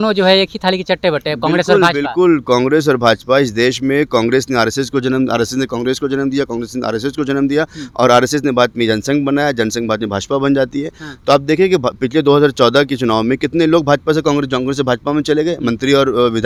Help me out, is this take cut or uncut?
uncut